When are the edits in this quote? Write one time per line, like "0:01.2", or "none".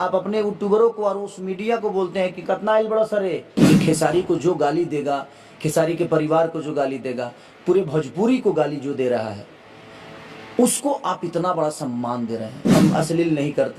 0:03.5
0:12.6